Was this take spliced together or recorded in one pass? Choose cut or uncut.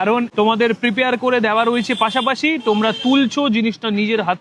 uncut